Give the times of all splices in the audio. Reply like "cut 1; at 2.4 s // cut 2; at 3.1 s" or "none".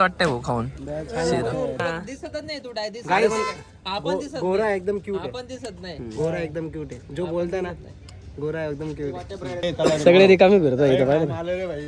cut 1; at 1.8 s // cut 2; at 9.6 s

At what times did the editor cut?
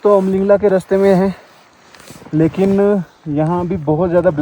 none

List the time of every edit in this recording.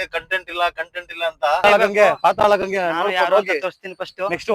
cut 1; at 1.6 s

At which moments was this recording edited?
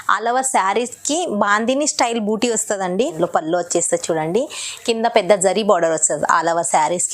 cut 1; at 3.1 s

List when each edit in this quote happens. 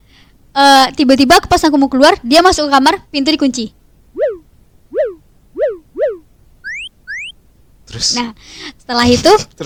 none

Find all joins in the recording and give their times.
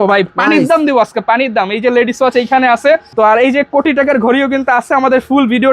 cut 1; at 3.1 s

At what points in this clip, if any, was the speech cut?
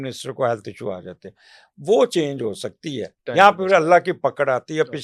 cut 1; at 3.2 s

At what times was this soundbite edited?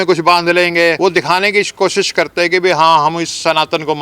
cut 1; at 1.0 s

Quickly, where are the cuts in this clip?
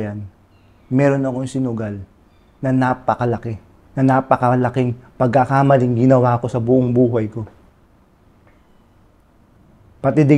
none

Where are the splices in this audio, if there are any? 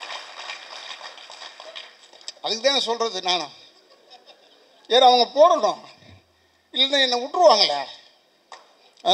none

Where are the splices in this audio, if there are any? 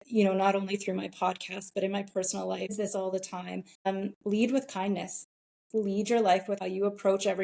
cut 1; at 2.7 s // cut 2; at 3.9 s // cut 3; at 6.6 s

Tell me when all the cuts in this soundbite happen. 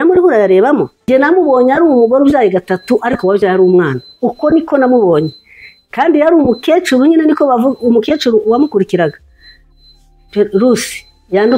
cut 1; at 1.1 s

